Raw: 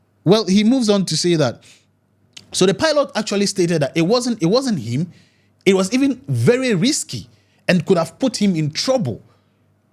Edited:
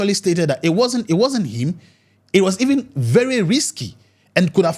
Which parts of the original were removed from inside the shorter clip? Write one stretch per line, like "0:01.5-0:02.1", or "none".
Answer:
none